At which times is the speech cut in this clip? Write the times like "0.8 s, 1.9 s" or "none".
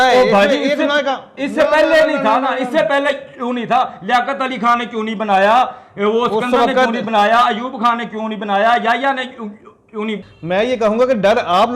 10.3 s